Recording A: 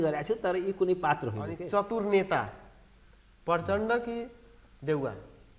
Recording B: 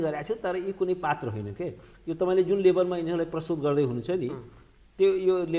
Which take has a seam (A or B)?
A